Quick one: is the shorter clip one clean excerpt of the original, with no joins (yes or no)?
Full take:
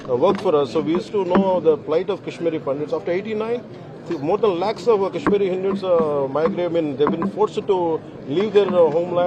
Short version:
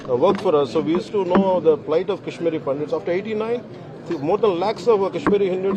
yes